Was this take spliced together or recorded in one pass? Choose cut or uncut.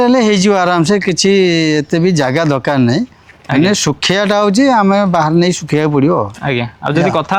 uncut